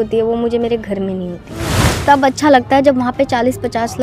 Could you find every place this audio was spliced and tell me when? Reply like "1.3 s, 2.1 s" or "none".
1.9 s